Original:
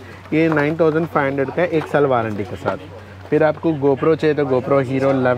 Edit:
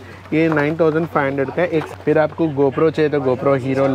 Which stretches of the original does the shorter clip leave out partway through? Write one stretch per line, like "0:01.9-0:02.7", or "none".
0:01.9-0:03.1